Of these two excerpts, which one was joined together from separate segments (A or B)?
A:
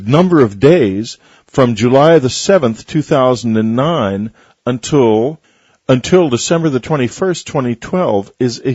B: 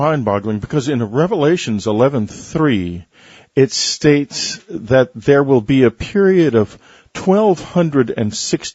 B